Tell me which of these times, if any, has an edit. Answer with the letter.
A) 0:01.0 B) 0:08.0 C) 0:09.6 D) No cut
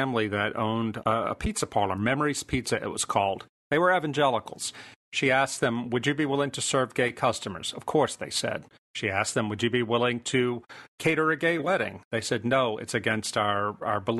A